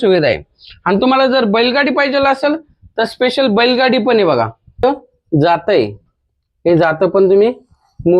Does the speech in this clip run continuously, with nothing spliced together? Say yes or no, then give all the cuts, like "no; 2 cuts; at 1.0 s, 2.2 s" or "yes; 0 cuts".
no; 1 cut; at 4.8 s